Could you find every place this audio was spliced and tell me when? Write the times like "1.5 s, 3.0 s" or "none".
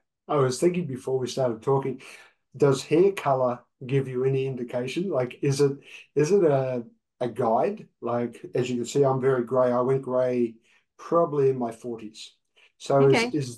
none